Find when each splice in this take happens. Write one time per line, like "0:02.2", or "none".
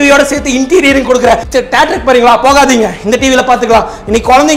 0:01.4